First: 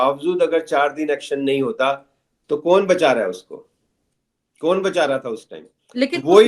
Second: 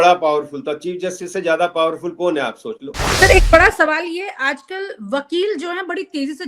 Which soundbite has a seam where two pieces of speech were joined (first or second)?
second